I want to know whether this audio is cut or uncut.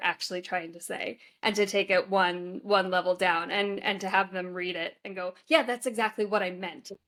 uncut